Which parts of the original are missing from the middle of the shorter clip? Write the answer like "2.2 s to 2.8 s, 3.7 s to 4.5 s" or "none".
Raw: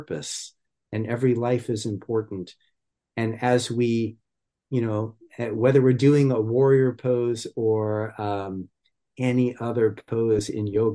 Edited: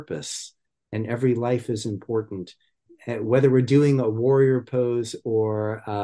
2.9 s to 5.2 s